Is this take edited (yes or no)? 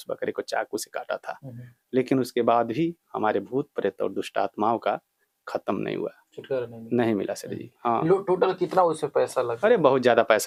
no